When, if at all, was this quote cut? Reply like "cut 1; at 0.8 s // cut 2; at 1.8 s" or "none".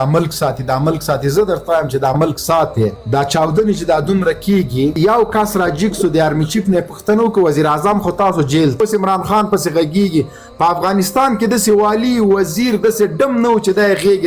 cut 1; at 4.9 s // cut 2; at 8.8 s